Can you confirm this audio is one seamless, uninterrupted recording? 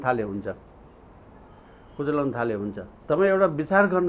yes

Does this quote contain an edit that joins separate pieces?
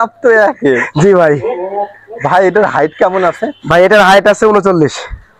no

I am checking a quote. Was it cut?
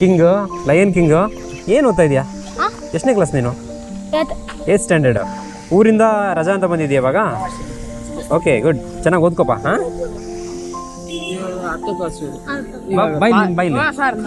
no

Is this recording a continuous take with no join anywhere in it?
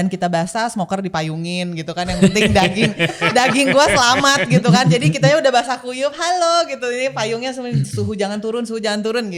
yes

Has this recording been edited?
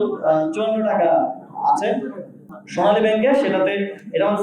yes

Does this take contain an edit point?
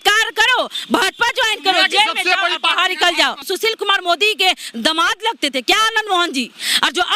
yes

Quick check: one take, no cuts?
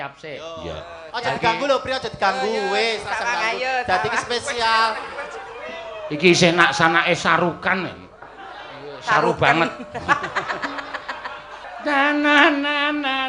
no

